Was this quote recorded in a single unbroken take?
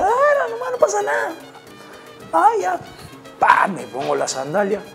yes; 0 cuts

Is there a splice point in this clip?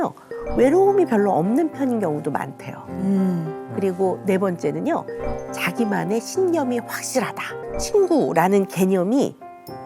yes; 1 cut; at 7.5 s

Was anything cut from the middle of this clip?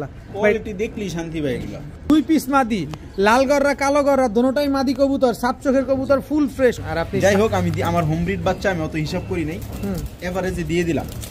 yes; 2 cuts; at 2.1 s, 6.8 s

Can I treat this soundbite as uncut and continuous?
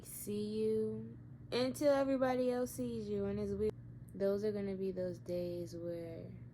no; 1 cut; at 3.7 s

